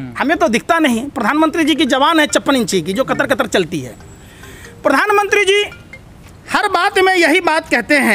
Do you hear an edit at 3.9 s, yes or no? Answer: no